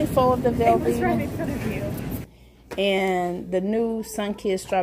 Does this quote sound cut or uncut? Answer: cut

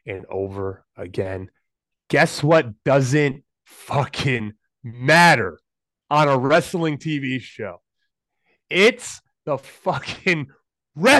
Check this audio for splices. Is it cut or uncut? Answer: uncut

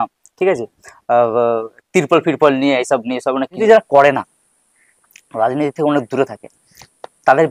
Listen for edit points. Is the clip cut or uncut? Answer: cut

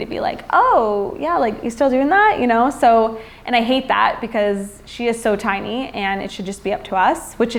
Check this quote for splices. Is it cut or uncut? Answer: uncut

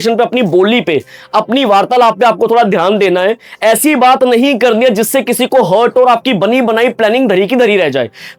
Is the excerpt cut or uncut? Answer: uncut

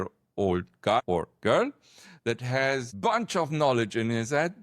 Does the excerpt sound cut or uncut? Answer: cut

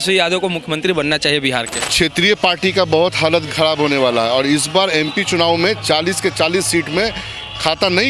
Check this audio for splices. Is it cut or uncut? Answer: cut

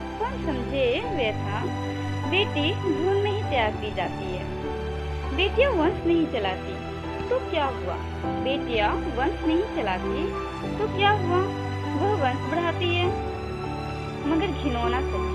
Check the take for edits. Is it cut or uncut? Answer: uncut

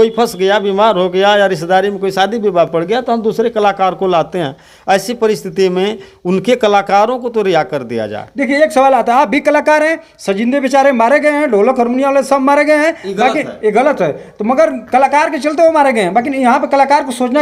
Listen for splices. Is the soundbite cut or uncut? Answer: uncut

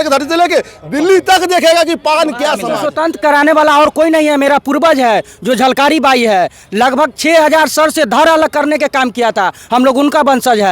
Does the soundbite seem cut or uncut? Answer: cut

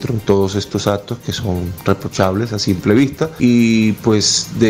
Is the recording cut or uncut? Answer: cut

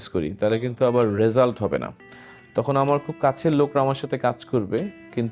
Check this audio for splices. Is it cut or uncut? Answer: uncut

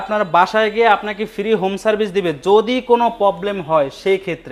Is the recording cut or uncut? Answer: uncut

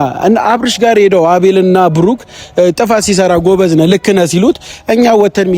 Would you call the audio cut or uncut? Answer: uncut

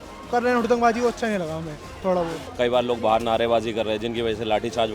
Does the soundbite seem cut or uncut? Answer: cut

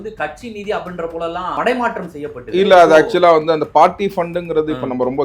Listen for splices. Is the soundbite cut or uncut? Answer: cut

